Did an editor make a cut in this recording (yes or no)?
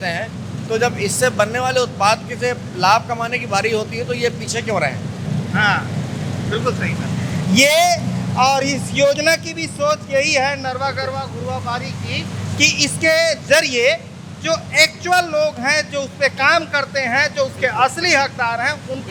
no